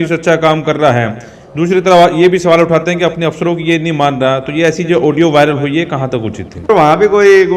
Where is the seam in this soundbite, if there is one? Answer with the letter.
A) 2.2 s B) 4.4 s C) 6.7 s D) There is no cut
C